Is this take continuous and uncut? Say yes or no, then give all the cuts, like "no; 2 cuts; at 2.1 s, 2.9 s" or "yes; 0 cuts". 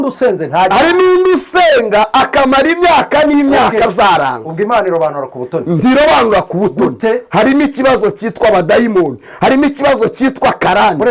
yes; 0 cuts